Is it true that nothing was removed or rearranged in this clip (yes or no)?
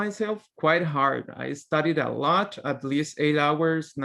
yes